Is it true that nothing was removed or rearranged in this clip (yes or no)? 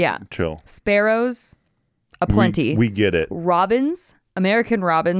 yes